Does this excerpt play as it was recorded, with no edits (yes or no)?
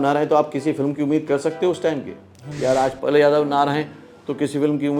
yes